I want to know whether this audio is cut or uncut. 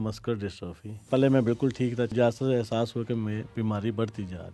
cut